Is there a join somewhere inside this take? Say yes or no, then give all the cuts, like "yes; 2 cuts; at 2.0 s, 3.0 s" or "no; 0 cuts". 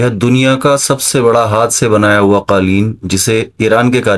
no; 0 cuts